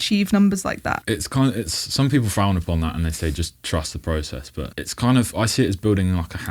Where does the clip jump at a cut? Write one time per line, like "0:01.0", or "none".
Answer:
0:00.9